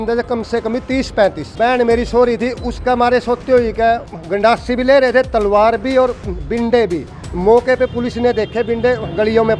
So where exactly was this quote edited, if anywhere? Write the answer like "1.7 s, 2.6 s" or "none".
1.5 s, 4.1 s

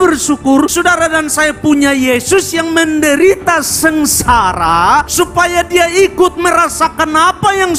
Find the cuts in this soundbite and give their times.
none

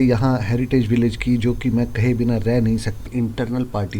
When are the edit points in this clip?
3.1 s

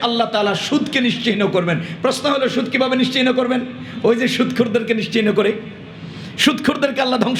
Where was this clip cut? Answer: none

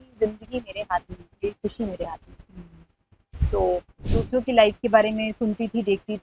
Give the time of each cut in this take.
4.1 s

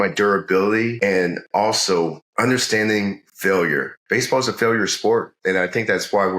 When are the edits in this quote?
1.0 s, 2.2 s, 4.0 s

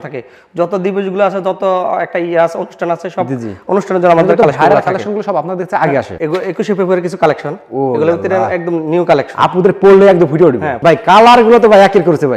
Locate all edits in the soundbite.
6.1 s, 10.7 s

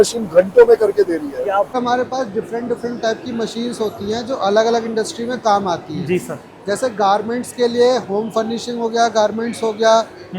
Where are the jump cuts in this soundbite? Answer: 1.7 s

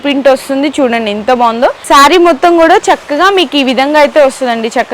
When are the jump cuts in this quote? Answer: 1.8 s

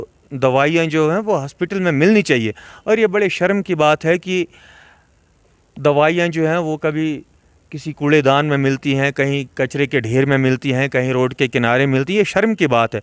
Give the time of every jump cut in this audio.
none

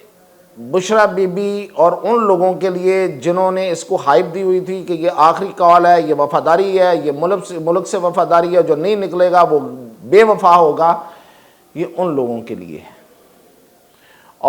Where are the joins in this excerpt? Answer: none

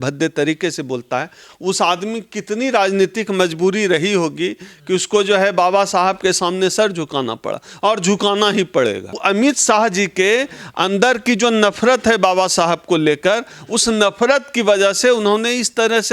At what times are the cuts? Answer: 9.2 s

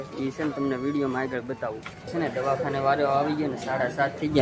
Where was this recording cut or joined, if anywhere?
2.1 s

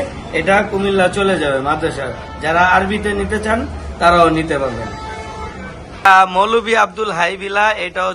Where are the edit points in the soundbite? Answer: 6.1 s

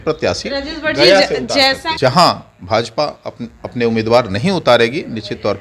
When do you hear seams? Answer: 1.9 s

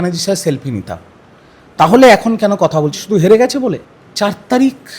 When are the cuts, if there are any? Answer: 3.8 s

